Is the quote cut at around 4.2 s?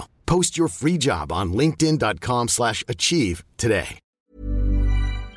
yes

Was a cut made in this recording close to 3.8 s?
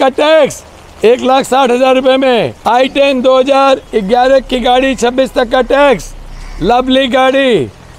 no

